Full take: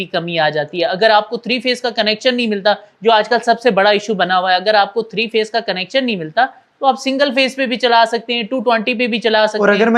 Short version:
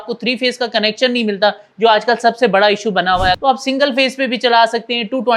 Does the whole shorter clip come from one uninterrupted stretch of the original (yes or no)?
no